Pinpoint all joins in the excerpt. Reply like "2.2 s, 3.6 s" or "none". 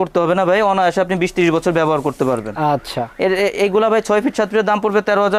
none